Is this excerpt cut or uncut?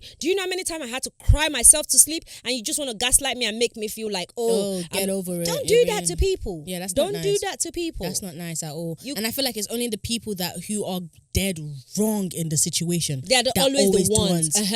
uncut